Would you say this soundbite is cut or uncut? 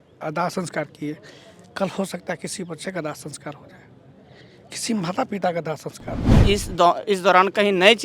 cut